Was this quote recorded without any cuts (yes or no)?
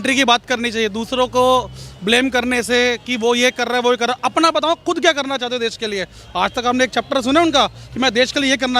yes